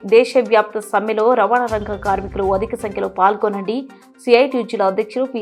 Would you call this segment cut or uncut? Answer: uncut